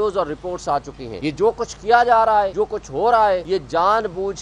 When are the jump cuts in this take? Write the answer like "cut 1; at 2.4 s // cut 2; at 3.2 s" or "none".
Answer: cut 1; at 1.0 s // cut 2; at 2.5 s // cut 3; at 3.4 s